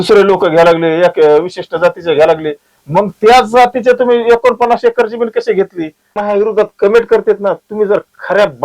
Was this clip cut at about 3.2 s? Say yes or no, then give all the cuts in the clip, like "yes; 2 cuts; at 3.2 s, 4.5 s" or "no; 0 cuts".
no; 1 cut; at 6.2 s